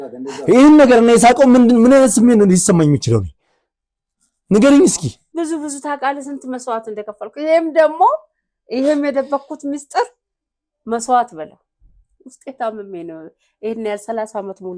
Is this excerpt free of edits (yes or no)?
no